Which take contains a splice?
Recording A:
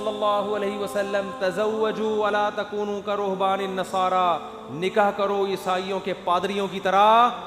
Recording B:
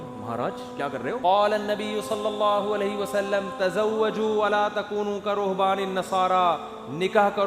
B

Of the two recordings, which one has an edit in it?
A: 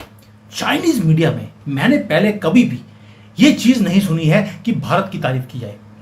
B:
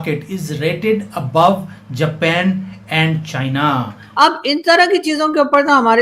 B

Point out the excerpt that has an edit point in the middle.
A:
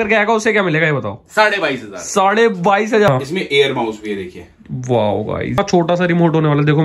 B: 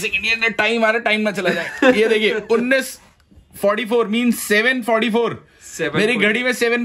A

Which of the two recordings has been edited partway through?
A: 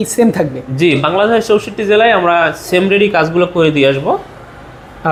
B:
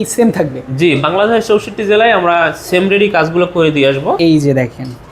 B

